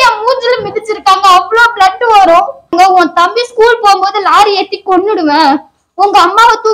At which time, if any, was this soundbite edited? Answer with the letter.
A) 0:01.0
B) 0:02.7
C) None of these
B